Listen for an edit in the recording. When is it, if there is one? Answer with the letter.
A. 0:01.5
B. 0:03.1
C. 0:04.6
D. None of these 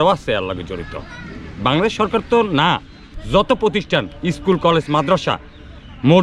B